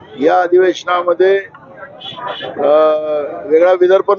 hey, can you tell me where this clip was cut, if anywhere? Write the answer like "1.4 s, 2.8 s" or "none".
none